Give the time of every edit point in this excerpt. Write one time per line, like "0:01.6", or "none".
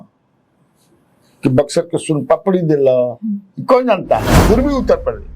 0:04.3